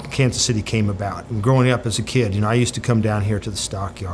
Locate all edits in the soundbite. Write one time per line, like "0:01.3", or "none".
0:01.3